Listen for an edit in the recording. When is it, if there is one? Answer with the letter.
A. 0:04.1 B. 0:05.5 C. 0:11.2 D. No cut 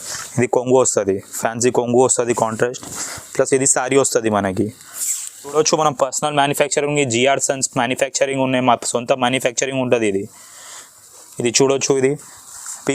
B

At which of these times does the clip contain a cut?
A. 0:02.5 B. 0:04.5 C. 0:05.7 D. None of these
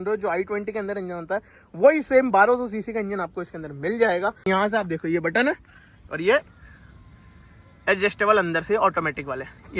B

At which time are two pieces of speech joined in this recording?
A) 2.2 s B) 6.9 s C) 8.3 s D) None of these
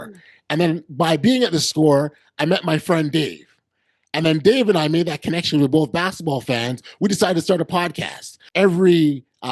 C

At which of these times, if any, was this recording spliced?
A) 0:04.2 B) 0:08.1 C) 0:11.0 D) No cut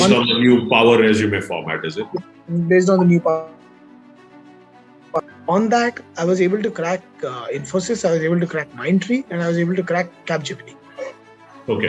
D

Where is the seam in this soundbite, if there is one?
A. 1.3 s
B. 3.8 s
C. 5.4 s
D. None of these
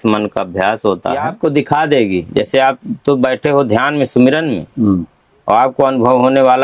A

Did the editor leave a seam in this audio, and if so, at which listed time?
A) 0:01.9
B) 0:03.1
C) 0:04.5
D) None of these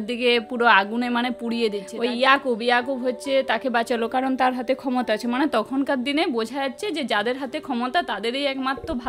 A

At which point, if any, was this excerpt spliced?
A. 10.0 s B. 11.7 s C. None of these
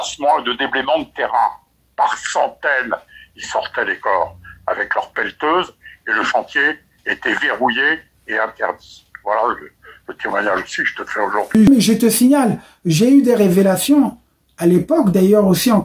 B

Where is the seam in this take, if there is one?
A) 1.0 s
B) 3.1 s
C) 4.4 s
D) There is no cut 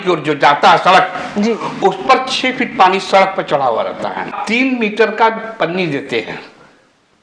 C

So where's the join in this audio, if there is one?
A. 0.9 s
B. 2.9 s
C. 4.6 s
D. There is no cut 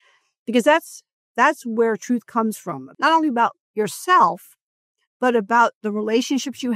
B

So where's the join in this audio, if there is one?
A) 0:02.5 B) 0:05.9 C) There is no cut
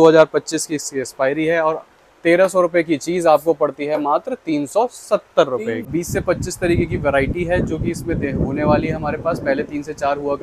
B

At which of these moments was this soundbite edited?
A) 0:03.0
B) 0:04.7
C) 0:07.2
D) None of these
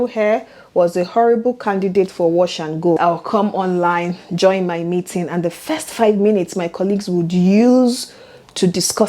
A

